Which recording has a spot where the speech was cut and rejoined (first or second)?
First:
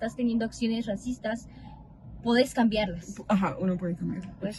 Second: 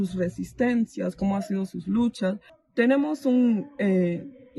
second